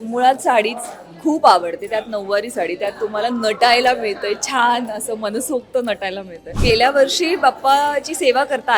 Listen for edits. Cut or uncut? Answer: cut